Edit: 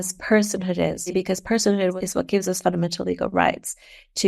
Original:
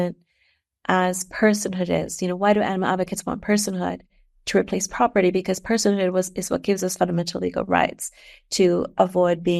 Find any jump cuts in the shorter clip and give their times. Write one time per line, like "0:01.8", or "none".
0:01.1
0:02.0